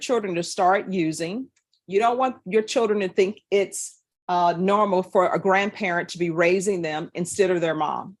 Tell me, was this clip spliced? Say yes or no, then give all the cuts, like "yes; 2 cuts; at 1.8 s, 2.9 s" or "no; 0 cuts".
no; 0 cuts